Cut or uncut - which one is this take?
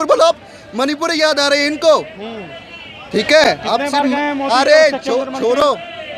uncut